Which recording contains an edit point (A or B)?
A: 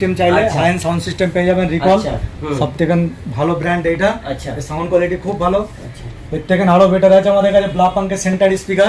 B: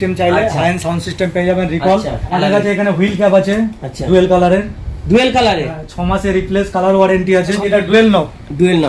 B